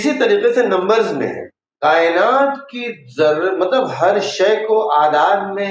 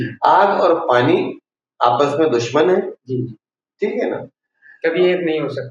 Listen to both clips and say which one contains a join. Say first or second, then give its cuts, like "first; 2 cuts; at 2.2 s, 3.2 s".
first; 1 cut; at 1.7 s